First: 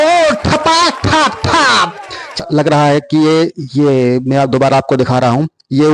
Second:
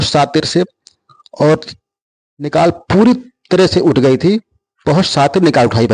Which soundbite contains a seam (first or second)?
first